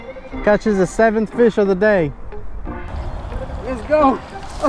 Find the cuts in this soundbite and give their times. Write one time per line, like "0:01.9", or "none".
0:02.9